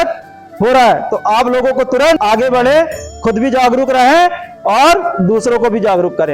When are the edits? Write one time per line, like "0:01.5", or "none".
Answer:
0:02.2